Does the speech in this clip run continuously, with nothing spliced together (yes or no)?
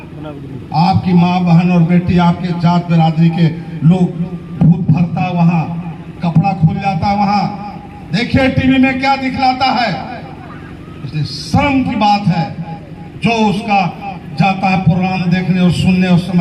yes